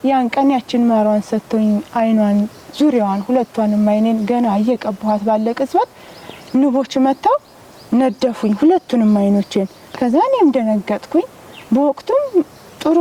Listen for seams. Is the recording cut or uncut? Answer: uncut